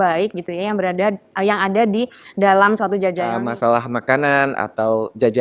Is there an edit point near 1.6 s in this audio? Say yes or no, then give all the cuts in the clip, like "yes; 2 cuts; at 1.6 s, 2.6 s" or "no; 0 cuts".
no; 1 cut; at 3.3 s